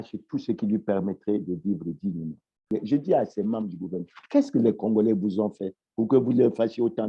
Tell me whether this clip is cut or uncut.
cut